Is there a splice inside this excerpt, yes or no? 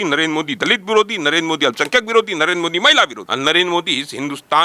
yes